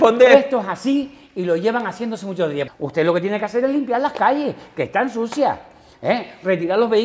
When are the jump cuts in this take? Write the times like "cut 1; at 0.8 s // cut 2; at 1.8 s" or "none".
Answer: cut 1; at 2.7 s